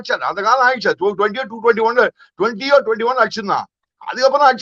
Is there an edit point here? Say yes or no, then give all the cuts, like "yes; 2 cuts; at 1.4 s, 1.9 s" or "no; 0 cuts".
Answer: no; 0 cuts